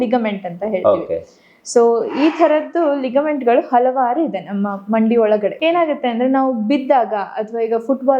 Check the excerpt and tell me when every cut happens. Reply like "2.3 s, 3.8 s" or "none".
5.6 s